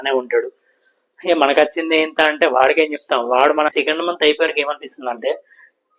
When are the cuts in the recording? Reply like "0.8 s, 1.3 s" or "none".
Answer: 3.7 s